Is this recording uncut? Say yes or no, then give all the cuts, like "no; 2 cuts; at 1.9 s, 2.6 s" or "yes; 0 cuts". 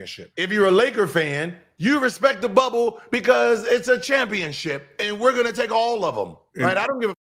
no; 1 cut; at 1.7 s